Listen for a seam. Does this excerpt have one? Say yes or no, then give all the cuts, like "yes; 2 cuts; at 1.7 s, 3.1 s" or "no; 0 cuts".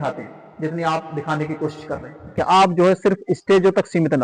yes; 1 cut; at 2.4 s